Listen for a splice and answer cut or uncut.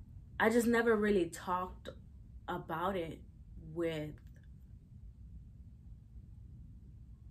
uncut